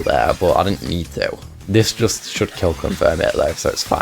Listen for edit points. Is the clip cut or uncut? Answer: cut